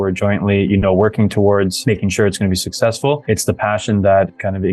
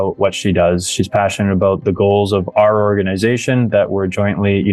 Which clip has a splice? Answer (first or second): first